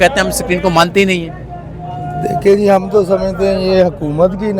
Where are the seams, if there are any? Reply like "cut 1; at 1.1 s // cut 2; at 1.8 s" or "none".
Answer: none